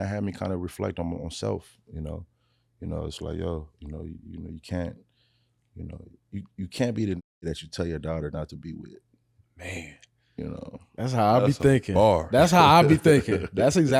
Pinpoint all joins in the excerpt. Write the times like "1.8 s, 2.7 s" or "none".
none